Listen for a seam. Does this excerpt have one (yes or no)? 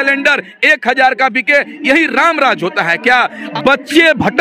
yes